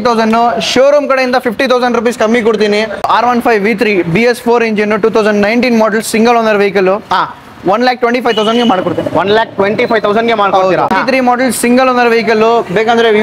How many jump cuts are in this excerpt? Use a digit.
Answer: 2